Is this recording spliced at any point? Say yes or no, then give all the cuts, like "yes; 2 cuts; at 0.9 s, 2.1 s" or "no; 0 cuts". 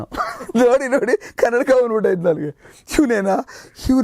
no; 0 cuts